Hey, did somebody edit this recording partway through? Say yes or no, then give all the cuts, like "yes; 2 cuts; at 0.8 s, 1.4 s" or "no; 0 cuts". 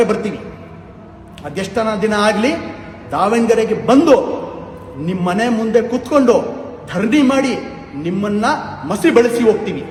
no; 0 cuts